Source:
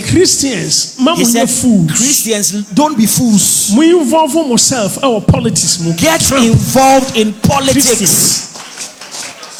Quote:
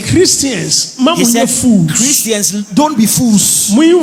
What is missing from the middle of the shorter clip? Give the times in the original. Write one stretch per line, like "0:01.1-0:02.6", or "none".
none